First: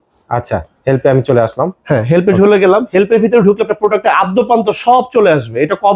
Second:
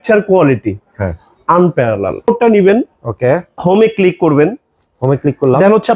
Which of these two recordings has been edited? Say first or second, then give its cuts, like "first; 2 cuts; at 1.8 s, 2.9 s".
second; 1 cut; at 2.3 s